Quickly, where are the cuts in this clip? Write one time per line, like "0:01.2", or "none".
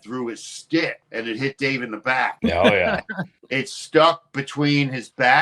0:01.0
0:02.3